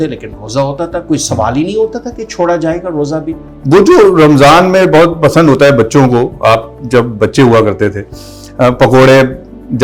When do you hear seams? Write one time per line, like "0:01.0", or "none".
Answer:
0:03.5